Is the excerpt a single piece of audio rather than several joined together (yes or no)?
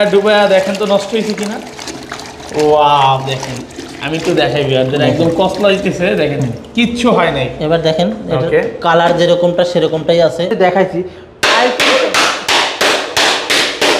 no